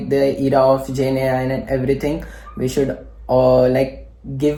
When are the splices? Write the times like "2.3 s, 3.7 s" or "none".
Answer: none